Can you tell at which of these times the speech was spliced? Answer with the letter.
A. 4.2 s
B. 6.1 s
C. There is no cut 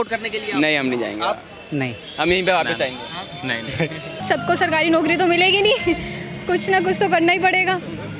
A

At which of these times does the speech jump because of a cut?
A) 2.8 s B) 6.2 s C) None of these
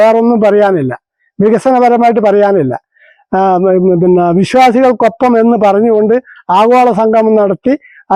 C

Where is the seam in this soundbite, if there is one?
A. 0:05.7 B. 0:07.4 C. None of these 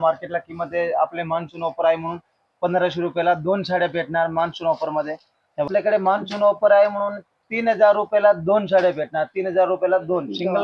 A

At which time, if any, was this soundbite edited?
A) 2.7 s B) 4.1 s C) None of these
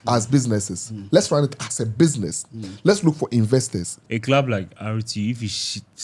B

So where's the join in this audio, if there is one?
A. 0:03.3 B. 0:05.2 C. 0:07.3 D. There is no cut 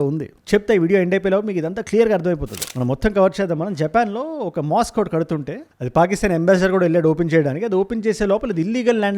D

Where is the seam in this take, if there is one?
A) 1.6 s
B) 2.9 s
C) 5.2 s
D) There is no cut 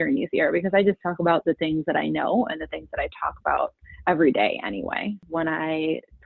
C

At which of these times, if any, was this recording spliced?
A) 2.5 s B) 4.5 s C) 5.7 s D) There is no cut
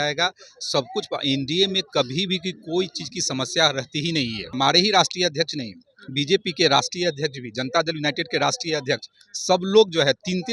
B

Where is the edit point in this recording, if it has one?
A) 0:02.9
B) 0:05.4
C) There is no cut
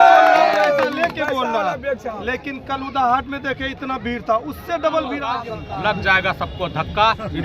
B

